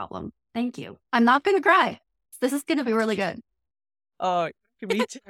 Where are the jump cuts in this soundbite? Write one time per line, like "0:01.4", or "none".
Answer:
0:00.9
0:02.3

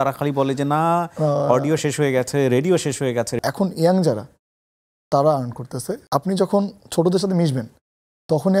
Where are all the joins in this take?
0:03.4
0:06.0

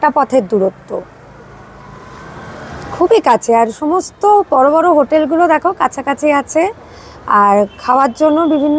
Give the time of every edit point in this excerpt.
none

